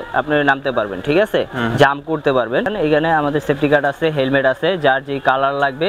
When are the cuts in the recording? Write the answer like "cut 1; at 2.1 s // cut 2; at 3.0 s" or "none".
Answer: cut 1; at 2.7 s